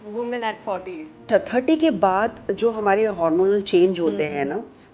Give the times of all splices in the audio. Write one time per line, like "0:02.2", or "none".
0:01.3